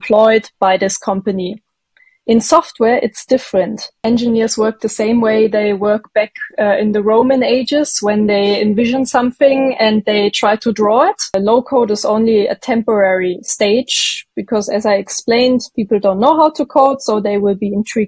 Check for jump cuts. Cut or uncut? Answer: cut